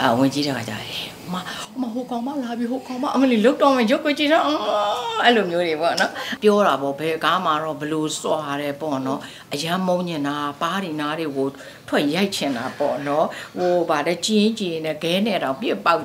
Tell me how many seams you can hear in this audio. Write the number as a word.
one